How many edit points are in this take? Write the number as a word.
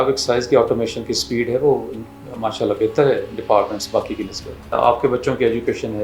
one